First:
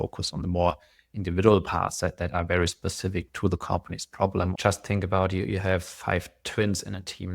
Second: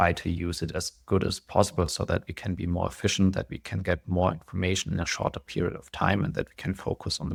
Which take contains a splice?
first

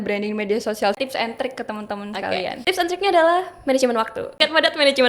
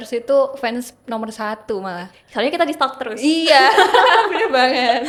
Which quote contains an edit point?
first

